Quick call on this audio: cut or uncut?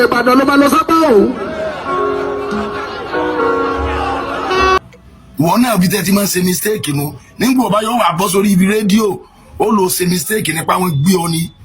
cut